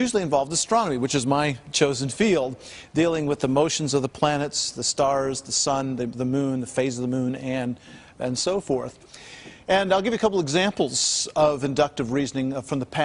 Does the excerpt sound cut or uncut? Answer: cut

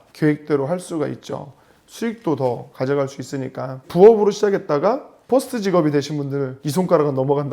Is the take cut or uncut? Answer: cut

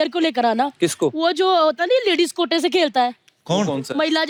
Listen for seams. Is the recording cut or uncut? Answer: uncut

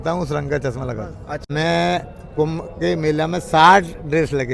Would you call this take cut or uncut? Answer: cut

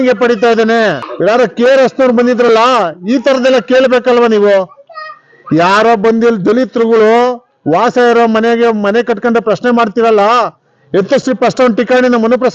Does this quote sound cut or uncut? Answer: cut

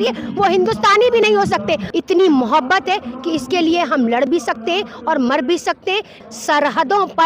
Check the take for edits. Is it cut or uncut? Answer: cut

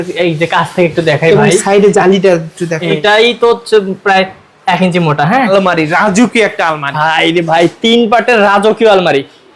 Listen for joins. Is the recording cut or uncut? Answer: cut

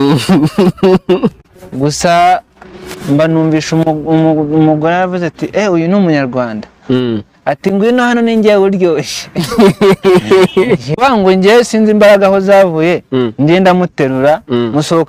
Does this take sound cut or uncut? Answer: cut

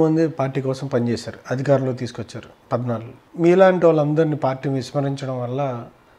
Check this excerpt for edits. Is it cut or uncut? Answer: uncut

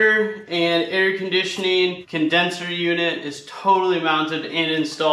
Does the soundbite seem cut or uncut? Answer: uncut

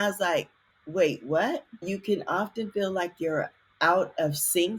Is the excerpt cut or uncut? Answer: cut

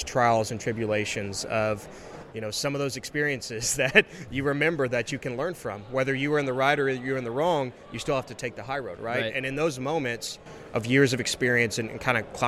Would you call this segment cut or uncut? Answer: uncut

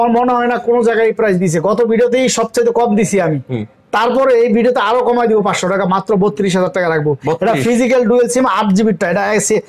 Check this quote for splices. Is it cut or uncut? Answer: uncut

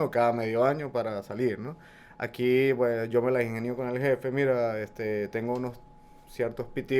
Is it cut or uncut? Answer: uncut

